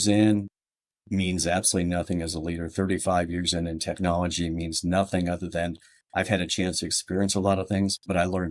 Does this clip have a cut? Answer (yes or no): no